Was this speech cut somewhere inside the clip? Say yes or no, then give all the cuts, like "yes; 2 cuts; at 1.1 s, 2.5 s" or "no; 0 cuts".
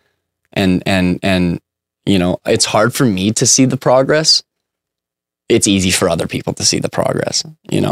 no; 0 cuts